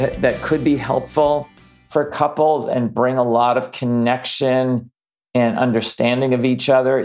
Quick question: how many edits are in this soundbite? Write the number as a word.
zero